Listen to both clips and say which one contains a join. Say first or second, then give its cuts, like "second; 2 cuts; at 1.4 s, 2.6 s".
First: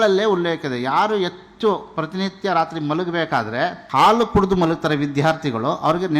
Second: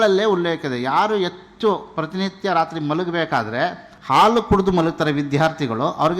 first; 1 cut; at 3.8 s